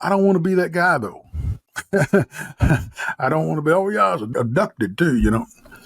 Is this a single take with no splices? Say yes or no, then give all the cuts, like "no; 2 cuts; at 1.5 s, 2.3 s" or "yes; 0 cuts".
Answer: no; 1 cut; at 4.2 s